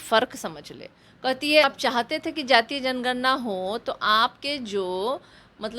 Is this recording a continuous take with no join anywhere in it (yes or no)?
no